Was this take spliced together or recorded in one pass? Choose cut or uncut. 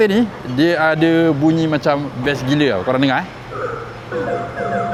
uncut